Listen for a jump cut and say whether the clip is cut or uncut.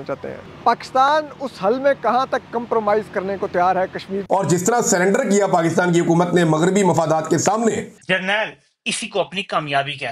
uncut